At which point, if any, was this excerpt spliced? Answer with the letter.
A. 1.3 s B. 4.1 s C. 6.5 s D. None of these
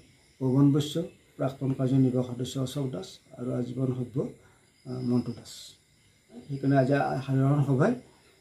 C